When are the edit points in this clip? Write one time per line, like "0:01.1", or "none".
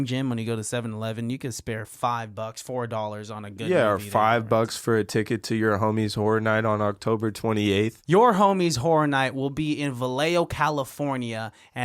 0:08.0